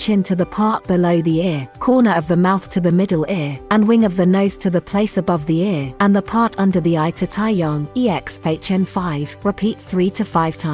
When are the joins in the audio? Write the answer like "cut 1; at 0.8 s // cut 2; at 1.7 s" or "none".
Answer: cut 1; at 1.7 s // cut 2; at 3.5 s // cut 3; at 5.9 s // cut 4; at 7.8 s // cut 5; at 9.3 s